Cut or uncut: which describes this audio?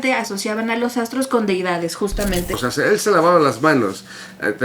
cut